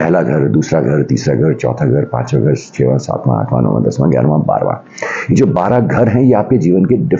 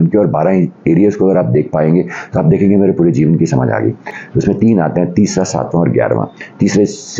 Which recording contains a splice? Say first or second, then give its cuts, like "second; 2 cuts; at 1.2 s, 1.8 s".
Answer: second; 1 cut; at 4.1 s